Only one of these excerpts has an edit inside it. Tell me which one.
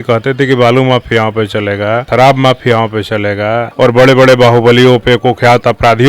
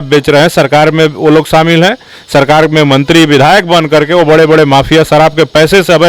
first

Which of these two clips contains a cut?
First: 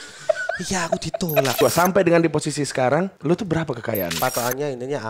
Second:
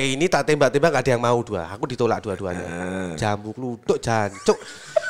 first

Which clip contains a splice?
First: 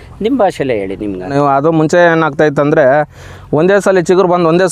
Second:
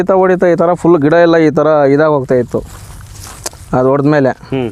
first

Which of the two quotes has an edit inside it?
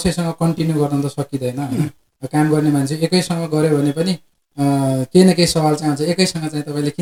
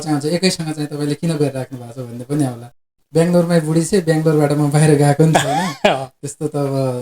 second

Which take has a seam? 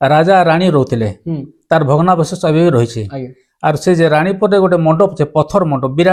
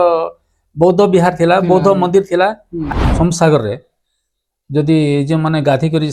second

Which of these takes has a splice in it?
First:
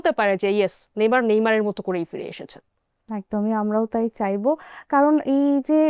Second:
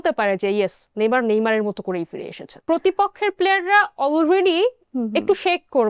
second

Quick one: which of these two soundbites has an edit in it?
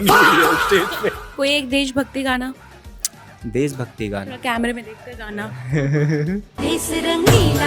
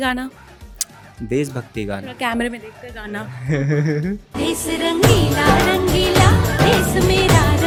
first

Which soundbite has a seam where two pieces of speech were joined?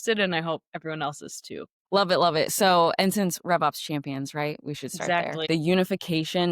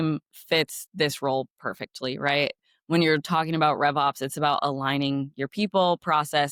first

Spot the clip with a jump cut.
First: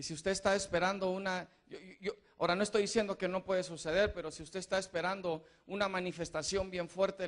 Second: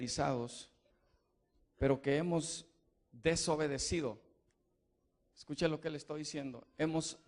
first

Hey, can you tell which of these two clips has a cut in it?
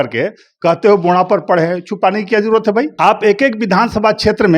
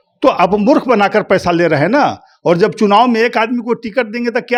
first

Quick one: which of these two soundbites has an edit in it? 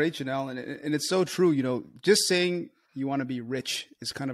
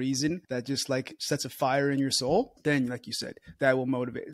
second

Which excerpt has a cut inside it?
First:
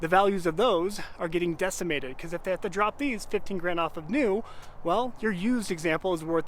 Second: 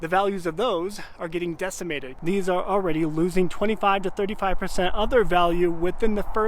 second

